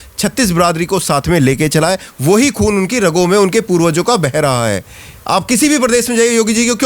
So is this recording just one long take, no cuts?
yes; 0 cuts

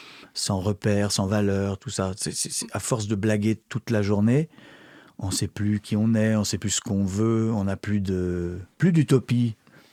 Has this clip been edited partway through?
no; 0 cuts

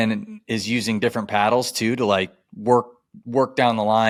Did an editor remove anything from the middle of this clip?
no; 0 cuts

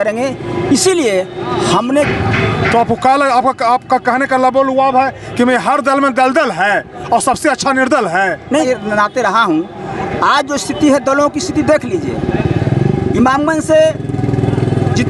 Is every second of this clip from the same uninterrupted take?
no; 2 cuts; at 2.1 s, 8.7 s

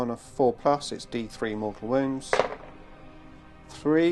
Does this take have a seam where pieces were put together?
no; 0 cuts

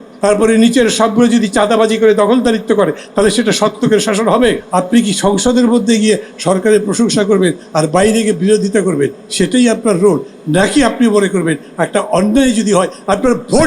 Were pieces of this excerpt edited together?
yes; 1 cut; at 4.6 s

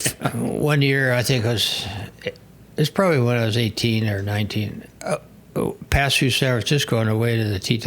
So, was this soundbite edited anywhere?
yes; 1 cut; at 4.9 s

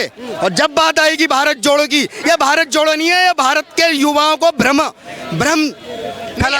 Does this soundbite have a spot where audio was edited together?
no; 0 cuts

